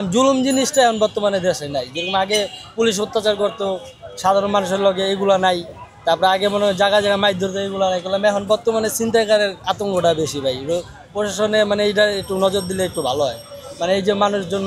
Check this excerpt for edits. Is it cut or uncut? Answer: uncut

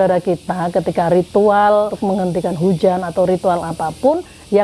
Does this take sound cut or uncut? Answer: cut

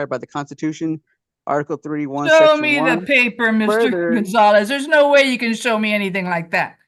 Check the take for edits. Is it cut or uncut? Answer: uncut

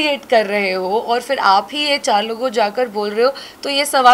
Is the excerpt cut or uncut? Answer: uncut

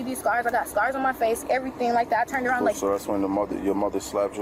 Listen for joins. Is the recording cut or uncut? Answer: uncut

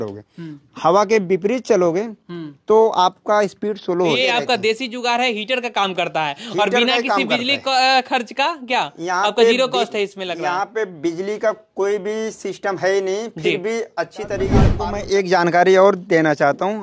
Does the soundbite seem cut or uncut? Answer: cut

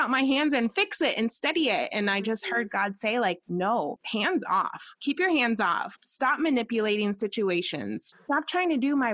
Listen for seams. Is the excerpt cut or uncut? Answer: cut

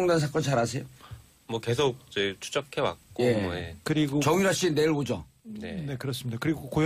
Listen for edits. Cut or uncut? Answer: uncut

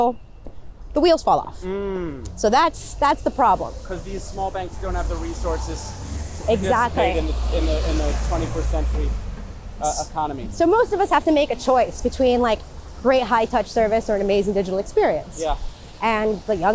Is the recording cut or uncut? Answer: uncut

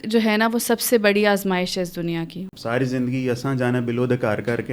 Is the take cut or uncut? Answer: cut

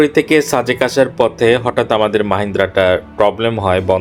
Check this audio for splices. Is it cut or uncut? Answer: uncut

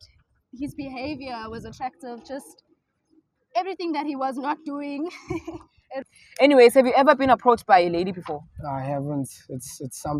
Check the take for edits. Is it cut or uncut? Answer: cut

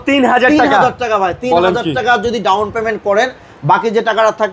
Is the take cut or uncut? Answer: uncut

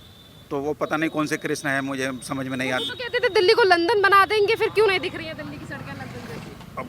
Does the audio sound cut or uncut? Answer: uncut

